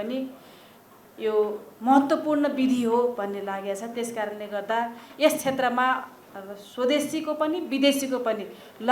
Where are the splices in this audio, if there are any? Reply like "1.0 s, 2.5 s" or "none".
none